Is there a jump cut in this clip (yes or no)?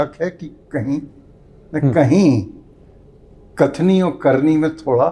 no